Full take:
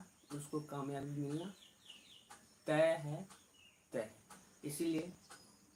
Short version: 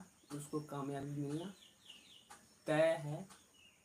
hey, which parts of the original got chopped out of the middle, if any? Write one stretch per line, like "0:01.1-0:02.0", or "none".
none